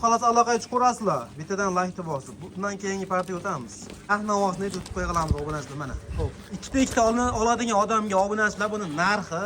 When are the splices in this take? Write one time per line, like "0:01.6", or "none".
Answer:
0:04.0